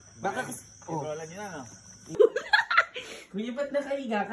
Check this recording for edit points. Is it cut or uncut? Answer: cut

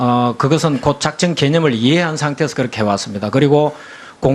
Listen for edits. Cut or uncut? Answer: cut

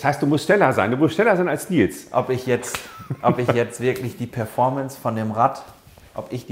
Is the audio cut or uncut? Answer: uncut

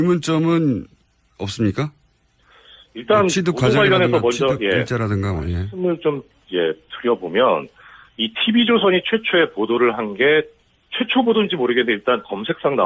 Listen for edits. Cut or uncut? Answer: uncut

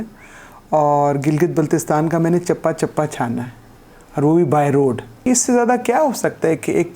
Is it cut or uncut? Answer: cut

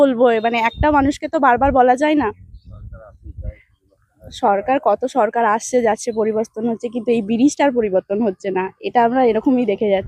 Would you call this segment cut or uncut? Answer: uncut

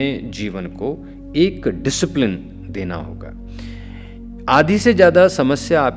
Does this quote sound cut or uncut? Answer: uncut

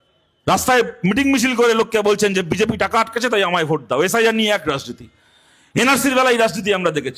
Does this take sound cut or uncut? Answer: uncut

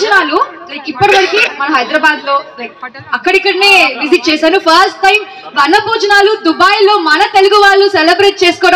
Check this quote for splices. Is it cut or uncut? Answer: uncut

